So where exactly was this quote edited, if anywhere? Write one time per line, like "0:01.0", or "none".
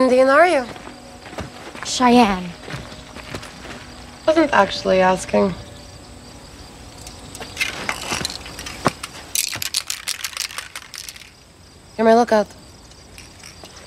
none